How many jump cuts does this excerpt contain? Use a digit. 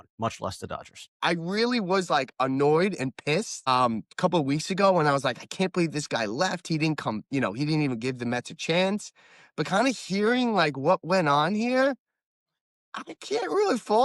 1